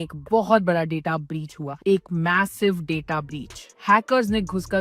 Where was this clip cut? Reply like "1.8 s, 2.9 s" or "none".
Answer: none